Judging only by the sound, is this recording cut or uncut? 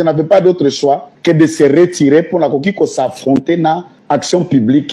cut